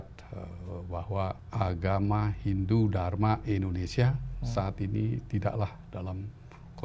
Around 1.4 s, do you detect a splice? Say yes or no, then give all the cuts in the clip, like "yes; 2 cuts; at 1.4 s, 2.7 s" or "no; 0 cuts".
yes; 1 cut; at 1.4 s